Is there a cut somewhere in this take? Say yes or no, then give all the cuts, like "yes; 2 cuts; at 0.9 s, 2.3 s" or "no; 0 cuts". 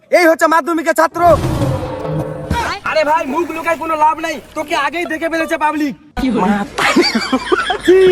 no; 0 cuts